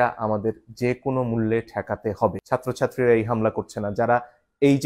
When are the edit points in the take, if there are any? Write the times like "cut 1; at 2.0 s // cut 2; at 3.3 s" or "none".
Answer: cut 1; at 2.4 s